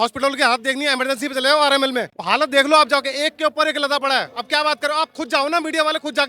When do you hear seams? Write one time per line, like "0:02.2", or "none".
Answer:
0:02.1
0:04.3